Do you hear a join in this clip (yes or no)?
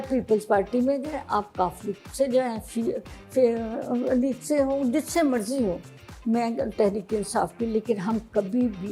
no